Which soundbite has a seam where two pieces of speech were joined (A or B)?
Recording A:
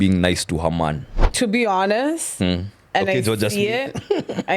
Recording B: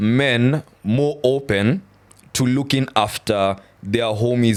A